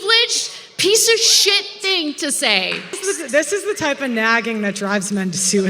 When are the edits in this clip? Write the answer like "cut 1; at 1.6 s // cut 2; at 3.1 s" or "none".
cut 1; at 3.0 s